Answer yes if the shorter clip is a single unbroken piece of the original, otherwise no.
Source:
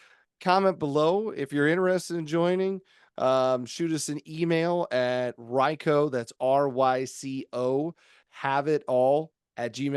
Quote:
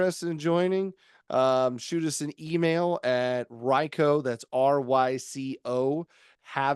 yes